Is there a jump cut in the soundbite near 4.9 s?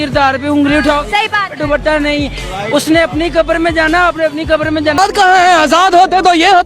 yes; 1 cut; at 4.9 s

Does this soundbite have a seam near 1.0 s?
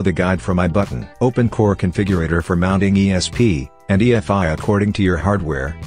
yes; 1 cut; at 1.0 s

